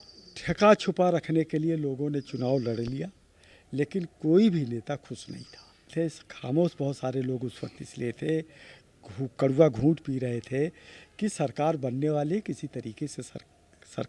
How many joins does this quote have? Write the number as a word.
one